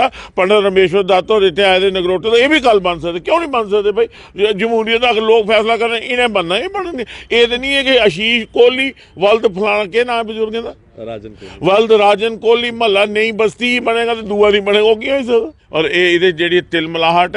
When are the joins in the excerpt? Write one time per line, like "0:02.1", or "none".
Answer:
0:15.6